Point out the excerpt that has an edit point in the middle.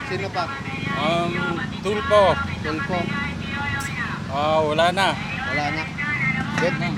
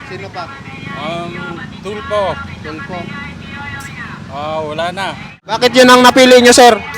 second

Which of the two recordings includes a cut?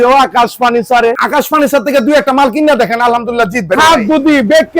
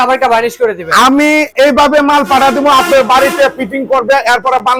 first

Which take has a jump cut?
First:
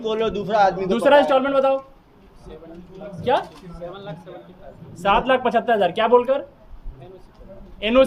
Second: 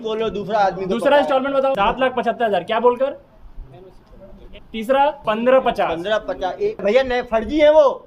second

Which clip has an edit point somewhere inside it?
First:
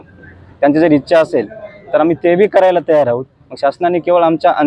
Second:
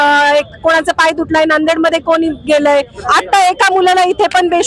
second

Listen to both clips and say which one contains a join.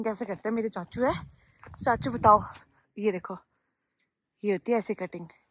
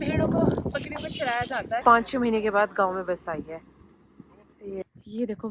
second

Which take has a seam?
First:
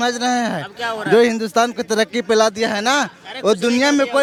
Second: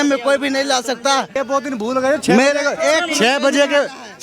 second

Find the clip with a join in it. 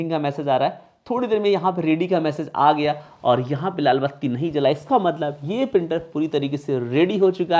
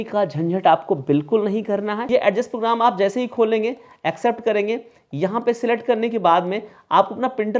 second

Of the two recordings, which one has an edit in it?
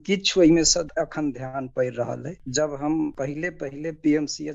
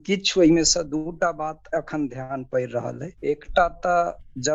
first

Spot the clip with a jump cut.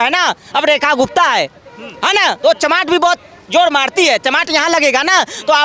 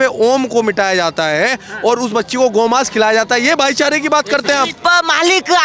second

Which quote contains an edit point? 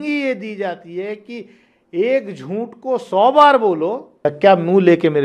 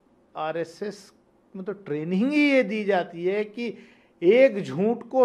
first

